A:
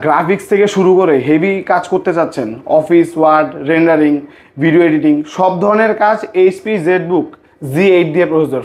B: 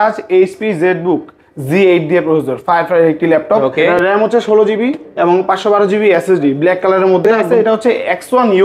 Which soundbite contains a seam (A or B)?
B